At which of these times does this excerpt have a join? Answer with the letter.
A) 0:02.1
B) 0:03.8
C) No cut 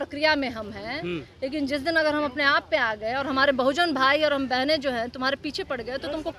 C